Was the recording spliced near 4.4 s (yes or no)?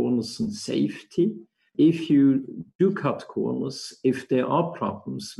no